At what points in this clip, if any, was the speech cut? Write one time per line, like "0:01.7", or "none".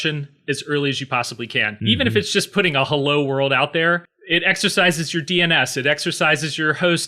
0:01.7
0:04.1